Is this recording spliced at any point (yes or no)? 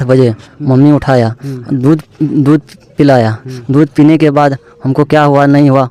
no